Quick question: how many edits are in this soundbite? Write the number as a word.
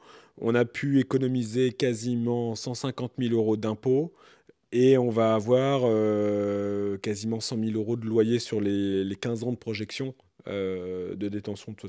zero